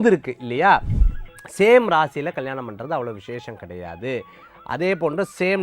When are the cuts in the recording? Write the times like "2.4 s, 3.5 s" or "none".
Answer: 1.0 s